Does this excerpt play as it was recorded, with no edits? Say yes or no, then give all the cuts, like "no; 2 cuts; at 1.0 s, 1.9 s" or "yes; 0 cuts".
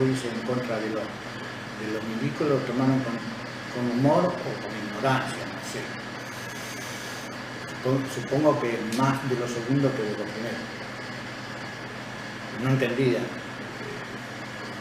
yes; 0 cuts